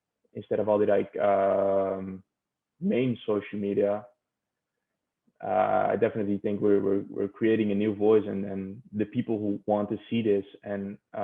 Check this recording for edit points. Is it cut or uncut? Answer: uncut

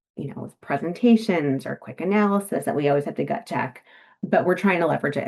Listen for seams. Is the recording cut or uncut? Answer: uncut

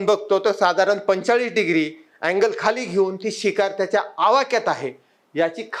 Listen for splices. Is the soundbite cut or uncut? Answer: uncut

